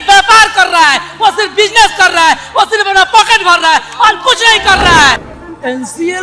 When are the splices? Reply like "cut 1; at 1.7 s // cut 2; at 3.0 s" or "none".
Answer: cut 1; at 5.2 s